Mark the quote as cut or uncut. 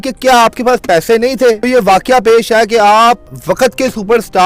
cut